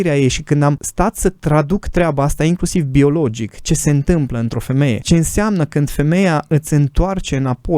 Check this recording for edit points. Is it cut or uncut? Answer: cut